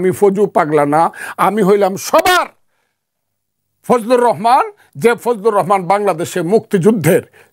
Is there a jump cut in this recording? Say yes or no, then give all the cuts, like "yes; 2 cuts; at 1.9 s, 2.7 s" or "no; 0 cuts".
no; 0 cuts